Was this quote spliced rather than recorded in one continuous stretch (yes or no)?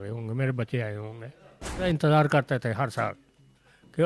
yes